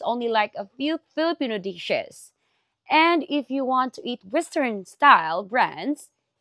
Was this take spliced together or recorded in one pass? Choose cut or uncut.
uncut